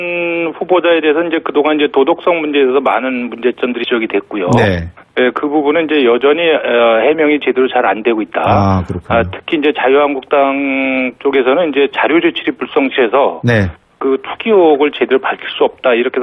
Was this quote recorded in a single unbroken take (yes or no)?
no